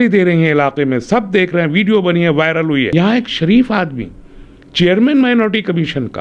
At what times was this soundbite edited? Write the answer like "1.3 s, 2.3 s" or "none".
2.9 s